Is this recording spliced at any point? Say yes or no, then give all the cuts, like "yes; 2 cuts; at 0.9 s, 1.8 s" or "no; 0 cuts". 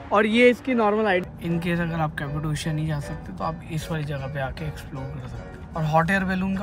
yes; 2 cuts; at 1.2 s, 5.6 s